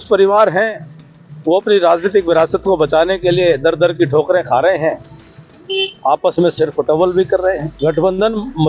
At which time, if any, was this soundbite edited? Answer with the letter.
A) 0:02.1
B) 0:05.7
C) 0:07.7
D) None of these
C